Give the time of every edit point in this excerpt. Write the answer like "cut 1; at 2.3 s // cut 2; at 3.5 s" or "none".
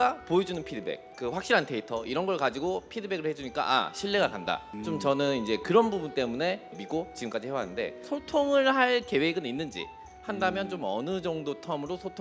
cut 1; at 8.0 s